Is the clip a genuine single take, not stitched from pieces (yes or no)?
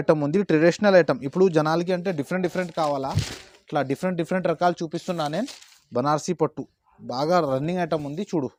yes